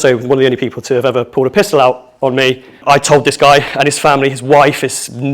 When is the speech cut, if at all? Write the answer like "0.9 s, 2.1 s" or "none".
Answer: 2.8 s